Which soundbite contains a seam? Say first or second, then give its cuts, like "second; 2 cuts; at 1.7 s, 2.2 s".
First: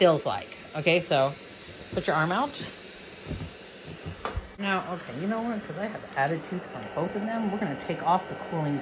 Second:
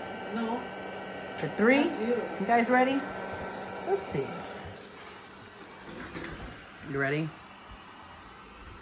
first; 1 cut; at 4.4 s